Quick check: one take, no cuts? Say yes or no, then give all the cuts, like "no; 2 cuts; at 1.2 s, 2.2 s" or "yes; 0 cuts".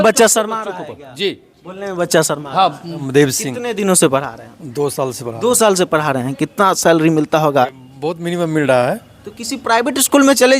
no; 2 cuts; at 2.9 s, 7.7 s